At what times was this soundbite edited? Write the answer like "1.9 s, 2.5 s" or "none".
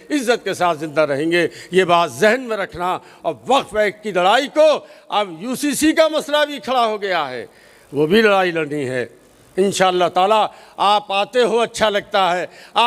none